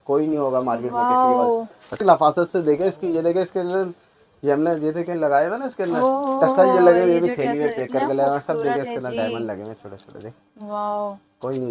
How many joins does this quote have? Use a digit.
1